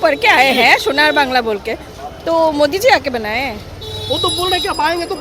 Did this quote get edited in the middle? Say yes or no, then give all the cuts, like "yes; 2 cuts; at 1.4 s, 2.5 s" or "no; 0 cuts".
no; 0 cuts